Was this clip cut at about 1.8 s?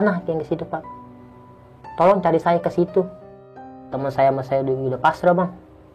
no; 1 cut; at 3.8 s

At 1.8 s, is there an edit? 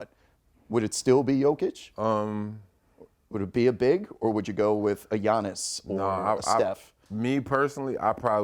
yes; 1 cut; at 1.8 s

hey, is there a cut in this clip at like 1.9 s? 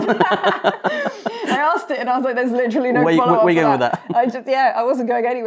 no; 0 cuts

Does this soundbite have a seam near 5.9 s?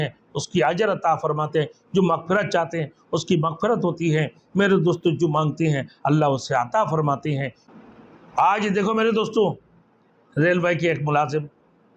no; 1 cut; at 7.6 s

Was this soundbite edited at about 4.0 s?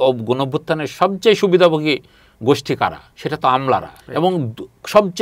yes; 2 cuts; at 3.1 s, 4.0 s

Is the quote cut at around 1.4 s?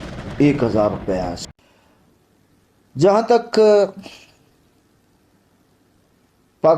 yes; 1 cut; at 1.4 s

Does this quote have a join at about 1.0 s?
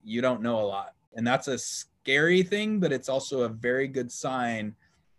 yes; 1 cut; at 1.0 s

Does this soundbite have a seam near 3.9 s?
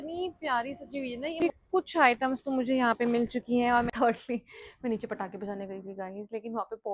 yes; 2 cuts; at 1.3 s, 3.9 s

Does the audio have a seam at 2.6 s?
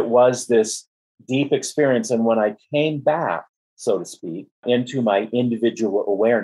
no; 1 cut; at 4.6 s

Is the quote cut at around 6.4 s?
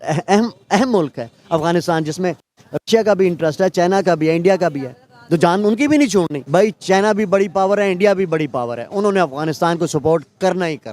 yes; 1 cut; at 6.4 s

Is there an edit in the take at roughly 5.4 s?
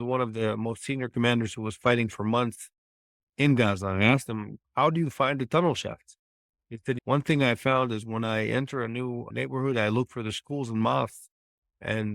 no; 1 cut; at 7.0 s

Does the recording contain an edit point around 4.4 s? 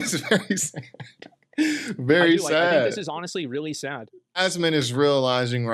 yes; 1 cut; at 4.4 s

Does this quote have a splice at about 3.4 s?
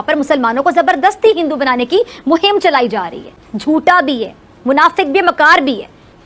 yes; 1 cut; at 3.4 s

